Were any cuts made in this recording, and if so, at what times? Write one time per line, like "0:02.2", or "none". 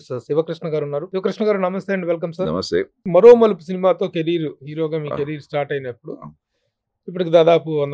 0:01.1
0:02.9

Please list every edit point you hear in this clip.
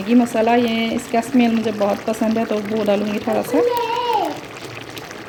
none

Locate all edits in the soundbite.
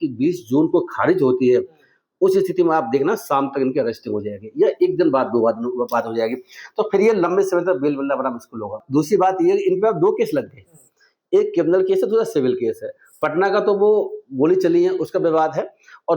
0:08.8

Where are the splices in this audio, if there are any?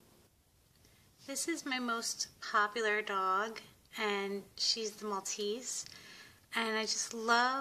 0:02.6

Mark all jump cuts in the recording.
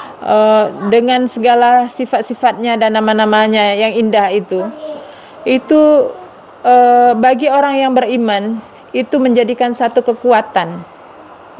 none

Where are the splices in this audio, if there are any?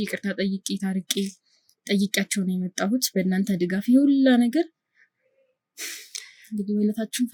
none

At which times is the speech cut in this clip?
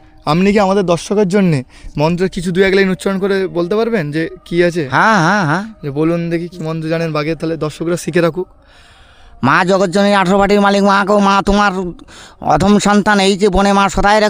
none

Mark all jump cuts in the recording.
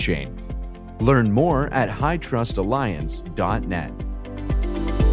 0:04.2

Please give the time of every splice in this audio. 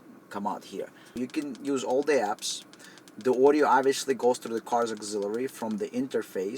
0:01.2

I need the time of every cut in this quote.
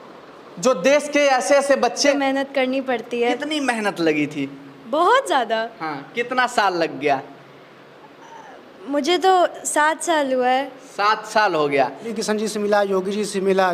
0:02.1
0:12.1

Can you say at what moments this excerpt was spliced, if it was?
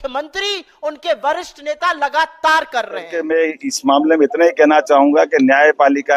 0:03.1

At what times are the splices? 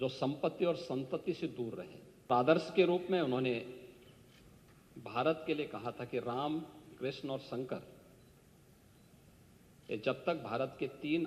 0:02.3

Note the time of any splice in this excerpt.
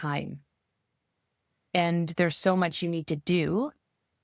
none

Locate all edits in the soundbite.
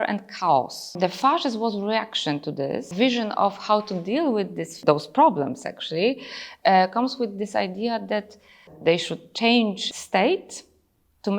0:00.9
0:02.9
0:04.7
0:08.7
0:09.8

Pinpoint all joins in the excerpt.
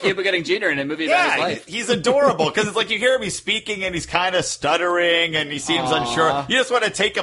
none

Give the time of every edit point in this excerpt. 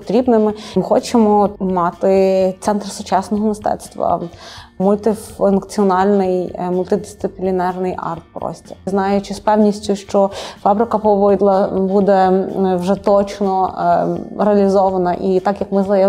0:00.7
0:01.6
0:04.8
0:08.9

